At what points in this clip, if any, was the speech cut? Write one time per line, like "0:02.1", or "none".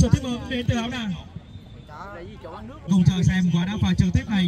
0:02.9

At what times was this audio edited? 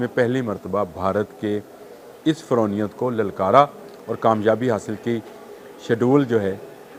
none

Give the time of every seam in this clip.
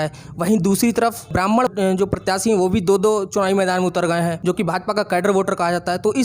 0:04.4

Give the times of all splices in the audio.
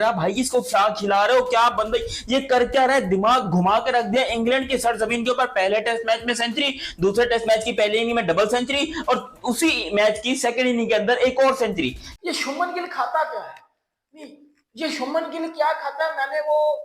0:12.1

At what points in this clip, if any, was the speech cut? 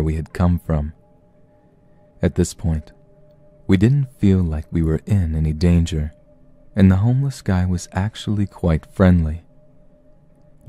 none

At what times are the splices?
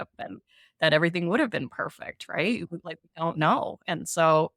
none

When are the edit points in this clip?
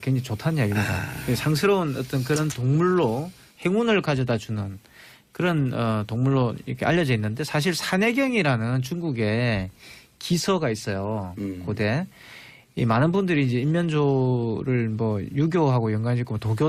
none

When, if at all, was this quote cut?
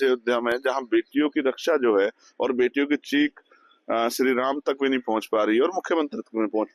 none

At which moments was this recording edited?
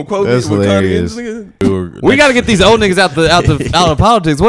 0:01.6

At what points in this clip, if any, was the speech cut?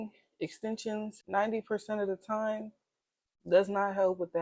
0:01.2

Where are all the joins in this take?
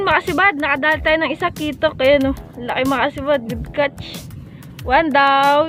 none

